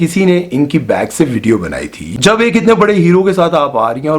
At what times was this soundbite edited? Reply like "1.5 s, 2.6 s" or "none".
2.0 s